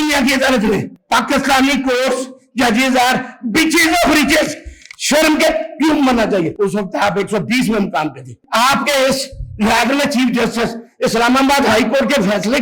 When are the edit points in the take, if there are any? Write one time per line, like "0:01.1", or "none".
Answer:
0:00.9
0:06.5
0:08.3